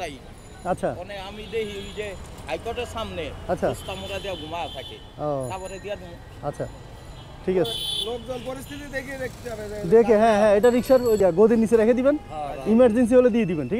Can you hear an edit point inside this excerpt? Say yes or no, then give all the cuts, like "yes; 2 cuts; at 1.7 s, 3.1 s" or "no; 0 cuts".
yes; 1 cut; at 11.2 s